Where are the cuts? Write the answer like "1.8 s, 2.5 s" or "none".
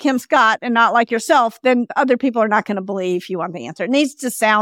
1.9 s